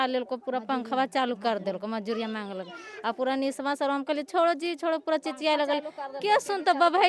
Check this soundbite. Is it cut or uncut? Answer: uncut